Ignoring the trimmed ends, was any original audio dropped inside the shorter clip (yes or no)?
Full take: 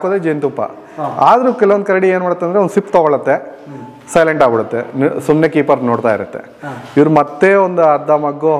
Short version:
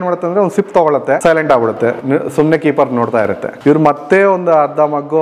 yes